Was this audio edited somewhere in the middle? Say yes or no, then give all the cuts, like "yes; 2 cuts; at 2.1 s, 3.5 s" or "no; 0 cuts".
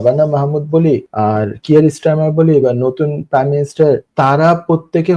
yes; 2 cuts; at 1.1 s, 4.1 s